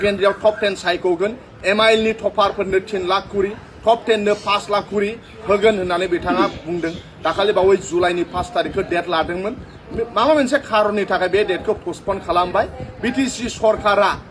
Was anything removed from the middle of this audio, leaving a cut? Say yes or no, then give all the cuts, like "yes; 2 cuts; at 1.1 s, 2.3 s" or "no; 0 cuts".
no; 0 cuts